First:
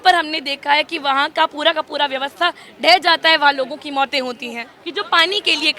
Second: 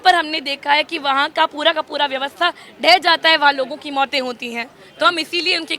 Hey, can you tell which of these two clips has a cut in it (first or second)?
first